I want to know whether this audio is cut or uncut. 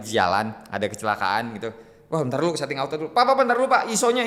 uncut